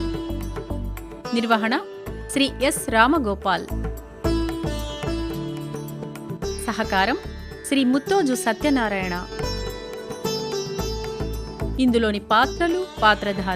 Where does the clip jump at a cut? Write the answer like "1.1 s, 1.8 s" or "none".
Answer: 1.1 s, 3.8 s, 6.3 s, 9.2 s, 11.7 s